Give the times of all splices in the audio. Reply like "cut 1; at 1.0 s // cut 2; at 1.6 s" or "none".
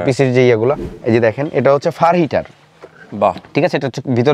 cut 1; at 0.9 s